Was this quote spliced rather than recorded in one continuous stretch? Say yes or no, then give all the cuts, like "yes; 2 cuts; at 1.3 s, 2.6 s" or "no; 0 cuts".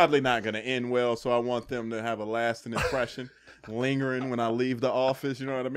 no; 0 cuts